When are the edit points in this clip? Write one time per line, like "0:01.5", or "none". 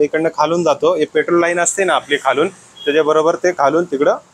none